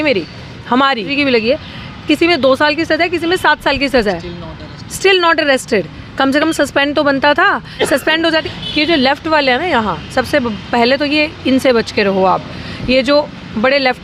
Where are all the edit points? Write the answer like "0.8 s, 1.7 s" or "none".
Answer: 1.1 s, 8.5 s